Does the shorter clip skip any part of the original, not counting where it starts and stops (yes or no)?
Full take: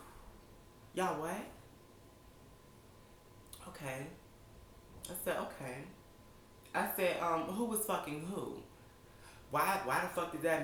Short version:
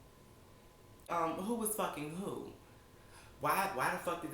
yes